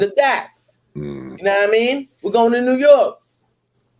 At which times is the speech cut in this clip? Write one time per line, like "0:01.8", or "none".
none